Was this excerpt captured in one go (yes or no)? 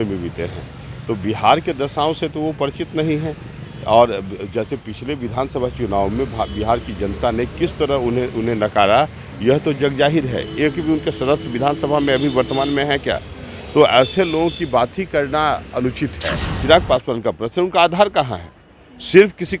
no